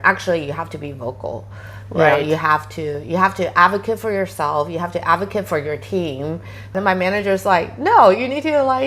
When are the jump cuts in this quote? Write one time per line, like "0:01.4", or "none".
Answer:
0:06.7